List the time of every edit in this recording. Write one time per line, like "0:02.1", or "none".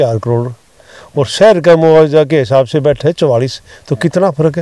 none

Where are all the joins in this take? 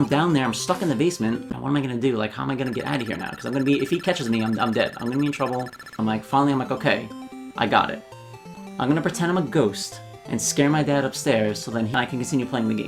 0:01.5
0:06.0
0:11.9

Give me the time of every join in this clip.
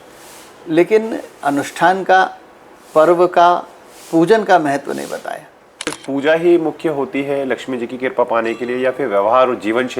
0:06.0

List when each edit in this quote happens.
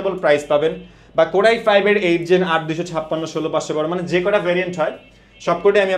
none

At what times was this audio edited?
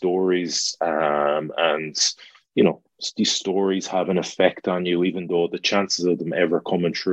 none

